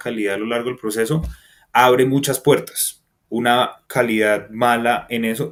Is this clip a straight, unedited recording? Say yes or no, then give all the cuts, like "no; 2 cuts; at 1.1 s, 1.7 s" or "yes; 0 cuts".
yes; 0 cuts